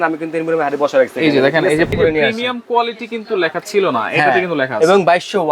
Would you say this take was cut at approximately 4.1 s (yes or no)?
no